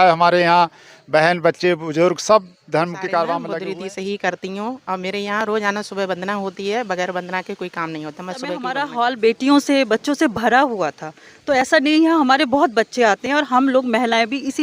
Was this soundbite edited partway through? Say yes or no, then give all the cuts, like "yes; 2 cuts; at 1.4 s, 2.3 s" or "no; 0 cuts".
yes; 2 cuts; at 3.5 s, 8.8 s